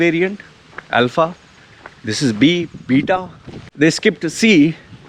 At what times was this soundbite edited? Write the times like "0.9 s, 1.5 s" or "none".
3.6 s